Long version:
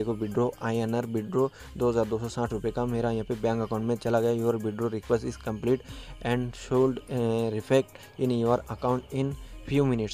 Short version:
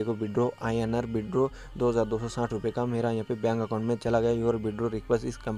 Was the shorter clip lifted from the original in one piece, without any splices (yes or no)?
yes